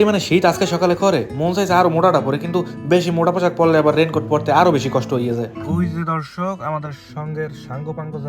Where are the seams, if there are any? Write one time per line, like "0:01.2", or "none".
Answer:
0:05.6

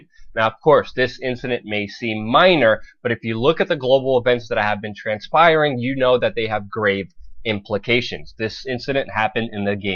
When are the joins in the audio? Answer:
0:07.0

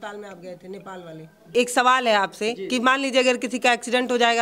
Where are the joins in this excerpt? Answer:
0:01.4

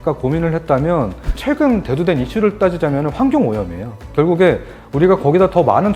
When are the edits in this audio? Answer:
0:01.3

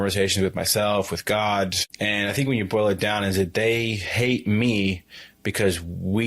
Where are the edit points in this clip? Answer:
0:01.9

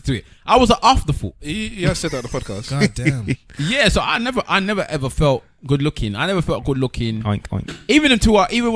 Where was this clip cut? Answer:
0:03.2

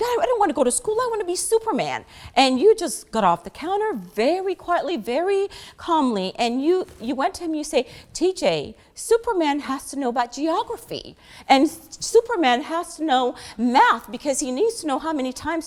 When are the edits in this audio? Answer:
none

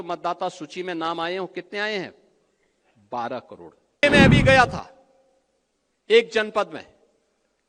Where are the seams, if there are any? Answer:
0:04.0

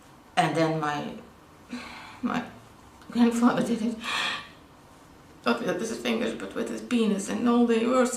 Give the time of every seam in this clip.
0:06.8

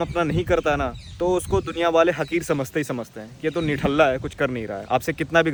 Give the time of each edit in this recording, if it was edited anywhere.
none

